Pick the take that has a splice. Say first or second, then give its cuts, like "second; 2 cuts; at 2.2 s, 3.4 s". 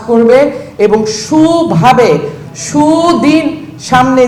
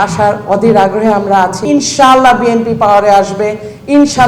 second; 1 cut; at 1.6 s